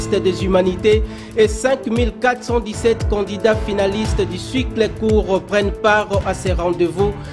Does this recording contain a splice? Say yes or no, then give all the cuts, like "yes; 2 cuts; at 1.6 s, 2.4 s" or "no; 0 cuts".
no; 0 cuts